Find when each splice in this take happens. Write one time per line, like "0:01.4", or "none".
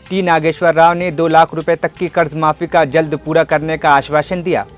none